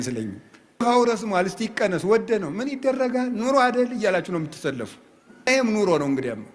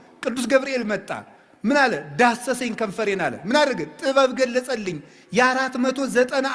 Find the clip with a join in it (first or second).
first